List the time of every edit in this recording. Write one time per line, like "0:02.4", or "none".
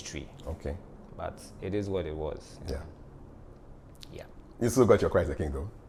none